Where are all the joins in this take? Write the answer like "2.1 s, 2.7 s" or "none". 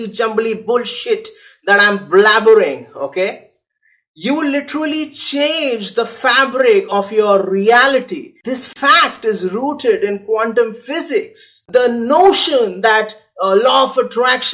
8.4 s, 11.6 s